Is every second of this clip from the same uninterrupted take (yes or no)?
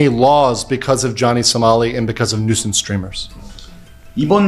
yes